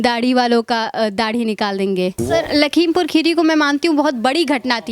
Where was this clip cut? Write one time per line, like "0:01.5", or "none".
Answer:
0:02.2